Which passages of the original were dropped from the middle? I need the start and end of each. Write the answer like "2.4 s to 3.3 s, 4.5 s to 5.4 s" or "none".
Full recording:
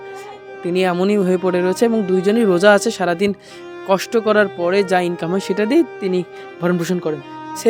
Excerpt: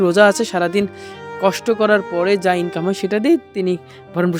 none